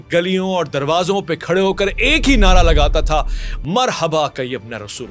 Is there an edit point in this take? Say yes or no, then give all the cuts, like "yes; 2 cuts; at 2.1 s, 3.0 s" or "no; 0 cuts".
no; 0 cuts